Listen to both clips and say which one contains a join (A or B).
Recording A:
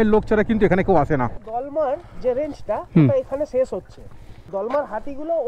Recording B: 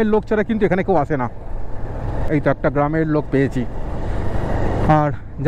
A